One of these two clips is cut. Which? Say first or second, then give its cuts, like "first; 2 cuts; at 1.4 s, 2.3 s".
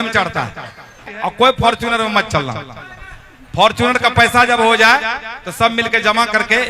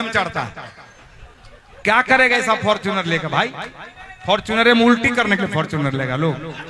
first; 1 cut; at 1.3 s